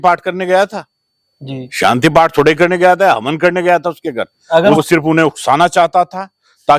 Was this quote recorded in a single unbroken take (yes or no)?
no